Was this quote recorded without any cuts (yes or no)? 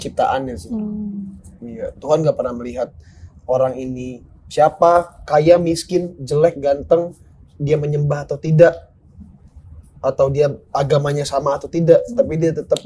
yes